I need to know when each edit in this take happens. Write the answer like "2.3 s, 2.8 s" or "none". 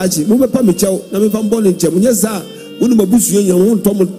none